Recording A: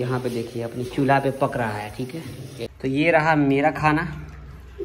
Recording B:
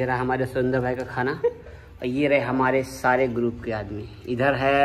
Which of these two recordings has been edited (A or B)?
A